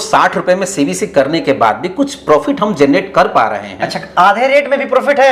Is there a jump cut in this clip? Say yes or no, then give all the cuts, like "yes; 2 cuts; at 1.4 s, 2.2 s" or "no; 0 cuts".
no; 0 cuts